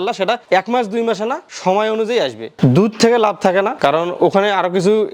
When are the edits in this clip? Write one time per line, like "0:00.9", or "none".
0:02.5